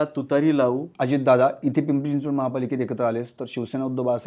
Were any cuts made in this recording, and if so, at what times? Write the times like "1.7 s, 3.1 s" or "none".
0.9 s